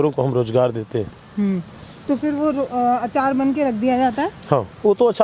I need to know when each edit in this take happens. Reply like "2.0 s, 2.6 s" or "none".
none